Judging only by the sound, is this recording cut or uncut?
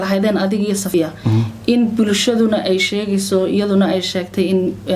cut